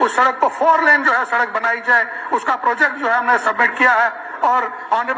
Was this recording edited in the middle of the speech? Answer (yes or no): no